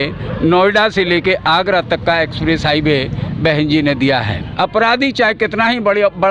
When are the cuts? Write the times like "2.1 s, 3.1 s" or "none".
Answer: 4.5 s